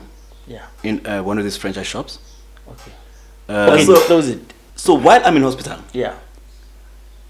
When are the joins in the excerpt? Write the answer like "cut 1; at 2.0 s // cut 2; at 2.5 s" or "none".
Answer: cut 1; at 3.7 s